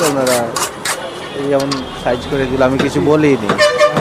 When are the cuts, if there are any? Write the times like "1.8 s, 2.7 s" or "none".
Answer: none